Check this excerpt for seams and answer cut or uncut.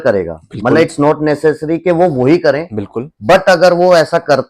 uncut